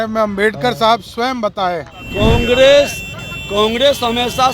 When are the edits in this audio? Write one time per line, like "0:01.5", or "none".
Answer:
0:02.0